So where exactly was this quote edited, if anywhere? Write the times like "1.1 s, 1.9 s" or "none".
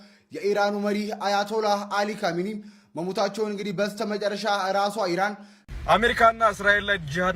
5.8 s